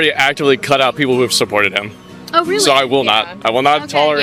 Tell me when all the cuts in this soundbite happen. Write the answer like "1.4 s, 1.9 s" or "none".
none